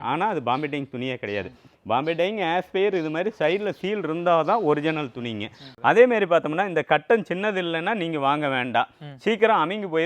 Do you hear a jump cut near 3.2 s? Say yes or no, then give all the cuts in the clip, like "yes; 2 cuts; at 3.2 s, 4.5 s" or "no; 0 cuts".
no; 1 cut; at 5.6 s